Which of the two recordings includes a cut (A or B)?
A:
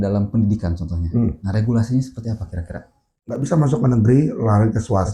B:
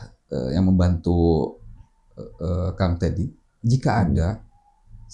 A